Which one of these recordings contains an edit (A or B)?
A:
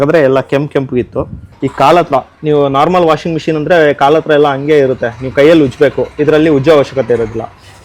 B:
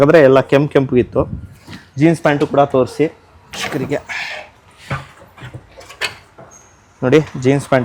A